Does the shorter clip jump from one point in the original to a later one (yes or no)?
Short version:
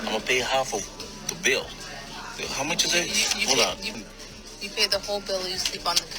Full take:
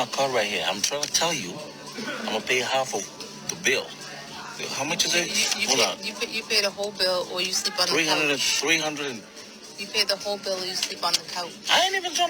yes